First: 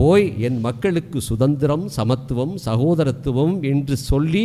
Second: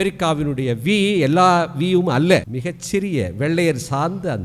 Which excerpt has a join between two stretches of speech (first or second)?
second